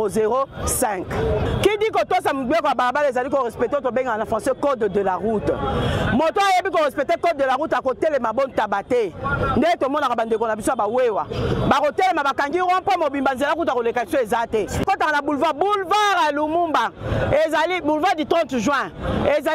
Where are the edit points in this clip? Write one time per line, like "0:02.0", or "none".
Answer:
0:01.5
0:14.8